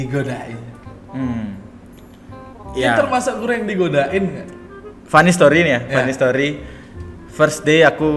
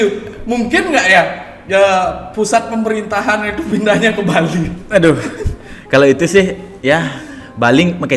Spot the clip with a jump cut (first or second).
second